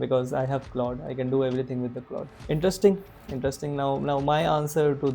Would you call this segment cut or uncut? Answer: cut